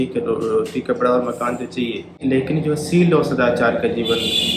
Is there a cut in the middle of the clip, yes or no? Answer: yes